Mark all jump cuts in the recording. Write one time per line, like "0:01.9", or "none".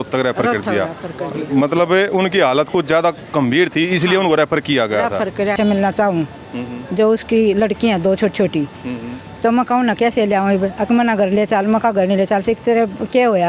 0:05.6